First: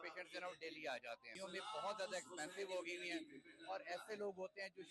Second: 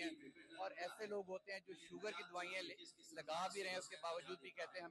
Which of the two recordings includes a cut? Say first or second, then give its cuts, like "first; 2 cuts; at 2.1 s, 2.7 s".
first; 1 cut; at 1.3 s